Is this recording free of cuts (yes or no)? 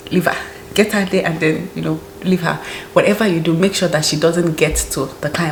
yes